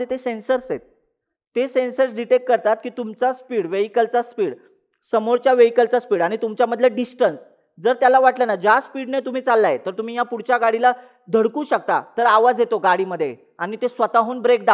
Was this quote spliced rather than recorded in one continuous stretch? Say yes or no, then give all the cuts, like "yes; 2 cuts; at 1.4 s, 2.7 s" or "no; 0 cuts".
no; 0 cuts